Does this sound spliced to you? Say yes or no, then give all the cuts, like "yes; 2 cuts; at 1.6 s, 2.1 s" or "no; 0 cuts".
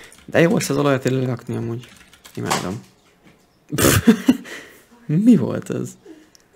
no; 0 cuts